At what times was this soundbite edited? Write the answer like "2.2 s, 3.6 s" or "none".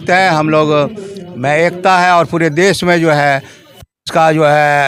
none